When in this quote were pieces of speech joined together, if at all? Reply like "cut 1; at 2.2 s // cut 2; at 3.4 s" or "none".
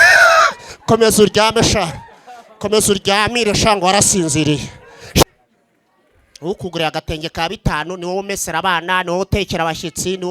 cut 1; at 5.2 s